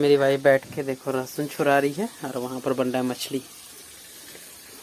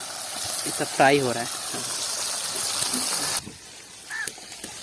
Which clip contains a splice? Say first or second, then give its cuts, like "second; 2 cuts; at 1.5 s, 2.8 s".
second; 1 cut; at 3.4 s